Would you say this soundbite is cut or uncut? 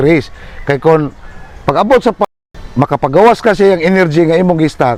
uncut